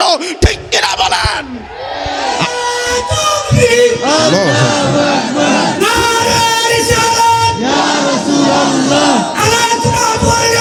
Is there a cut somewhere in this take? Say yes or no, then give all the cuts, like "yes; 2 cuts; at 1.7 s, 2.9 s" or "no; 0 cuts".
no; 0 cuts